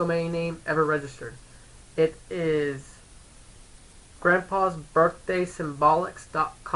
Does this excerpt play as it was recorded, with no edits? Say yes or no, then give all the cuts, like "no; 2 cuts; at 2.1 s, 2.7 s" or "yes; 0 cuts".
yes; 0 cuts